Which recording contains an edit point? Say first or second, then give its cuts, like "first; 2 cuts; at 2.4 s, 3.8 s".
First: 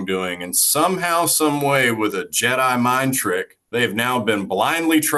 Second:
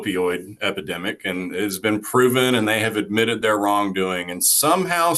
first; 1 cut; at 3.6 s